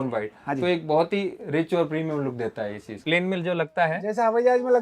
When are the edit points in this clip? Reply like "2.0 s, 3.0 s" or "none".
3.0 s